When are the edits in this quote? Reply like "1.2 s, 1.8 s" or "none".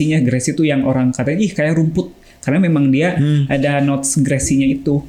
none